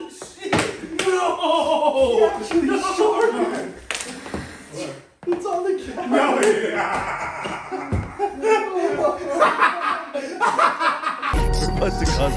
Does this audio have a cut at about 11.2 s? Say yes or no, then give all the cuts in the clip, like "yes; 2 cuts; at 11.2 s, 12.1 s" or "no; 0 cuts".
yes; 1 cut; at 11.2 s